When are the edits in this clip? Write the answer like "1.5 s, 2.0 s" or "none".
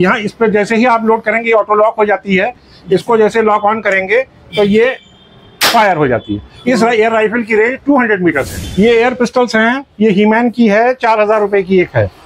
8.6 s